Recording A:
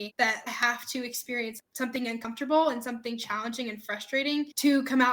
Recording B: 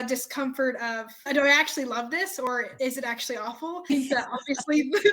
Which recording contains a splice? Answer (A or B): B